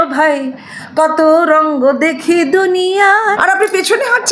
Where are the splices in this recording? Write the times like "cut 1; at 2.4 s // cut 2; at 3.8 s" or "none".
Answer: cut 1; at 3.4 s